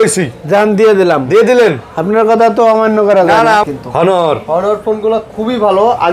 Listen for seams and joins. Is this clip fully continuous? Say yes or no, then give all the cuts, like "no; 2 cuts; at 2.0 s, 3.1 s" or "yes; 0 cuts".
no; 1 cut; at 3.6 s